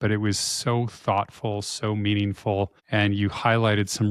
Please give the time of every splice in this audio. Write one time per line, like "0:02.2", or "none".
0:02.8